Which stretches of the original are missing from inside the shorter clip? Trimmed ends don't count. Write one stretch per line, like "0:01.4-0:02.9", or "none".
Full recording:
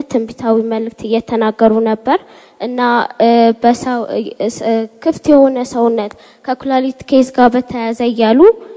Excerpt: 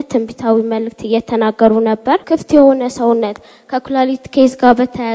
0:02.2-0:05.0